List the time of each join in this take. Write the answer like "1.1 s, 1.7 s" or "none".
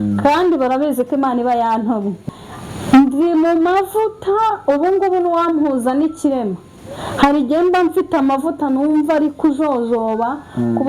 2.2 s